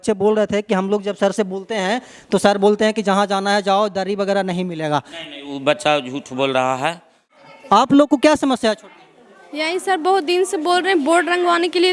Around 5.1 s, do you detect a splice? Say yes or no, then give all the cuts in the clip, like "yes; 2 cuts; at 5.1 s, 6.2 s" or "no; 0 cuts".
no; 1 cut; at 7.2 s